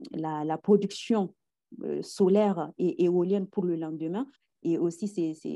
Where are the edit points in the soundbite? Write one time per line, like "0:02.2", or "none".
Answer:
0:04.5